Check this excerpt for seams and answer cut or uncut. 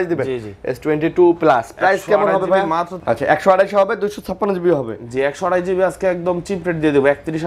cut